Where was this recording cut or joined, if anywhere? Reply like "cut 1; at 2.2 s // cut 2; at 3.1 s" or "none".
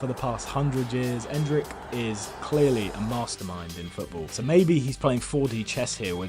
cut 1; at 4.3 s